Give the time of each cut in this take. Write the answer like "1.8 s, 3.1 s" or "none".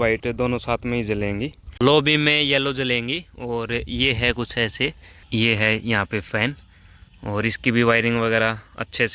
1.6 s, 5.1 s